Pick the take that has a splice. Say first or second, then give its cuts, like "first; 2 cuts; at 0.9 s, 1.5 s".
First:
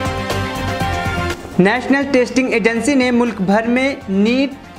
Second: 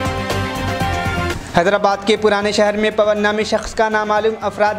first; 1 cut; at 1.3 s